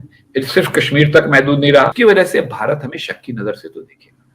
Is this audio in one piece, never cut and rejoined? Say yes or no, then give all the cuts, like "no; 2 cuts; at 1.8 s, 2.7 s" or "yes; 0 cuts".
no; 1 cut; at 1.9 s